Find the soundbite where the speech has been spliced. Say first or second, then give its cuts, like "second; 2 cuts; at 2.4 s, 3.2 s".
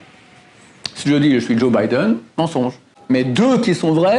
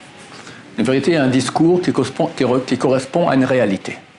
first; 1 cut; at 2.9 s